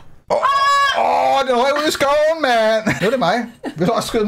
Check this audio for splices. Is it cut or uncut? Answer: cut